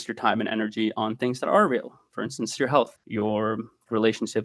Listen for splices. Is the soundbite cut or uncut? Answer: cut